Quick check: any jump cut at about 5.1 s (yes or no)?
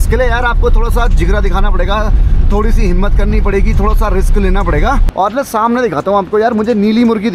yes